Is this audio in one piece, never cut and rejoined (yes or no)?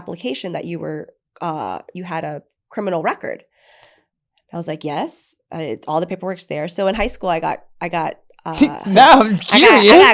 yes